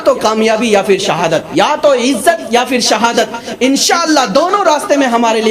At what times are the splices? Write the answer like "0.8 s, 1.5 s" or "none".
1.5 s